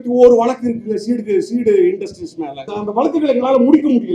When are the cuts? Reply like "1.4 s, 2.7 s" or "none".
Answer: 2.7 s